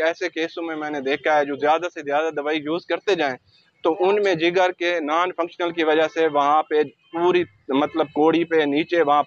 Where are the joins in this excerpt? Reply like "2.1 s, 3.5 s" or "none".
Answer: none